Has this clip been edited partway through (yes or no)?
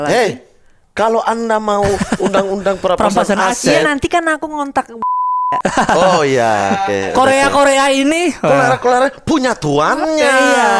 no